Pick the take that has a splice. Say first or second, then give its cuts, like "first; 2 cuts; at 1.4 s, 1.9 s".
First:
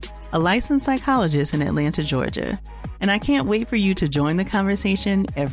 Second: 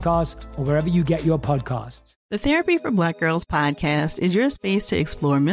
second; 1 cut; at 2.1 s